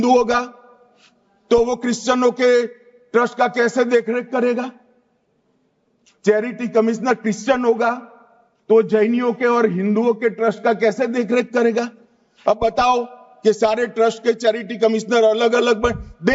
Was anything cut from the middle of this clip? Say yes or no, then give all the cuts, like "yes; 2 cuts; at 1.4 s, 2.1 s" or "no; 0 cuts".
no; 0 cuts